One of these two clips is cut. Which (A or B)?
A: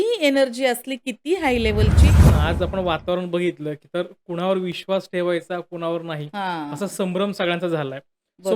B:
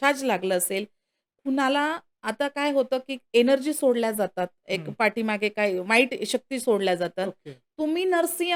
A